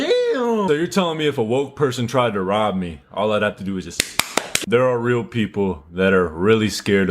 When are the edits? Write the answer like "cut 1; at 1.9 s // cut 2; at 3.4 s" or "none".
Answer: cut 1; at 4.5 s